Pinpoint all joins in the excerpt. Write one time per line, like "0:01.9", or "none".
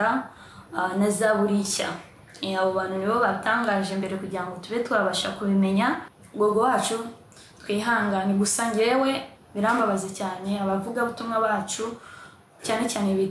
0:06.2
0:09.3